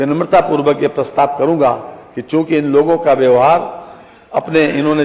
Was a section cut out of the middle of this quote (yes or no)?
no